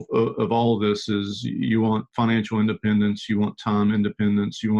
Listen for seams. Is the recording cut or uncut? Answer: uncut